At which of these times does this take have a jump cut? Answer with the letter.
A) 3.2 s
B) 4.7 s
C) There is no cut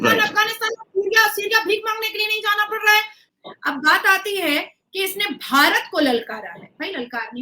A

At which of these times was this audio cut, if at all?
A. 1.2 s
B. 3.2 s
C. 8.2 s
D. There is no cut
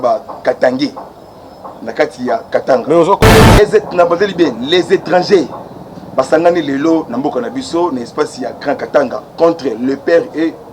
B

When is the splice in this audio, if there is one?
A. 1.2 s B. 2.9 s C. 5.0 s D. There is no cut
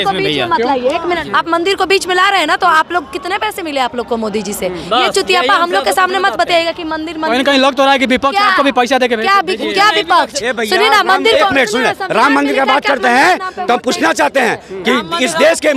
A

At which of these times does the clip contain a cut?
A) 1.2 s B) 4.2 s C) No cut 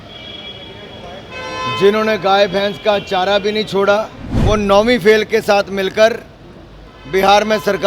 B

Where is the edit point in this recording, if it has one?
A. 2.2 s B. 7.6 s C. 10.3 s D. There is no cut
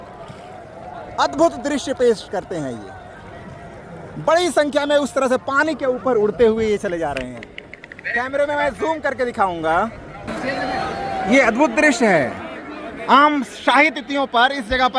C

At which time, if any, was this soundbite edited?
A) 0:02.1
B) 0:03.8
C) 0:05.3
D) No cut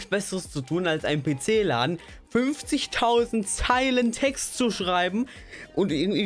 D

